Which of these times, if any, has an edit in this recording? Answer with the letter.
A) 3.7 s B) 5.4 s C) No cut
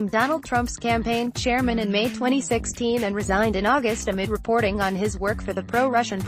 C